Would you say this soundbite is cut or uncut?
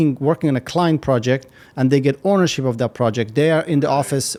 uncut